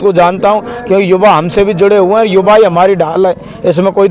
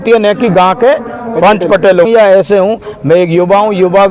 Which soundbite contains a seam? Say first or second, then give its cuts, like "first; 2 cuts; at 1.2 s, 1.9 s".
second; 1 cut; at 2.1 s